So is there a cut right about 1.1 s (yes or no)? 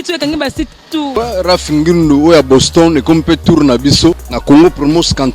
yes